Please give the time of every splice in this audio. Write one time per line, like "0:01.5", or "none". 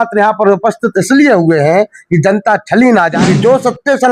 0:03.1